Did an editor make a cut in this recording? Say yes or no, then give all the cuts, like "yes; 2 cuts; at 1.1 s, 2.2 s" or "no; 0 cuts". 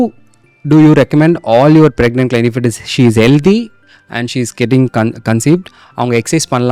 no; 0 cuts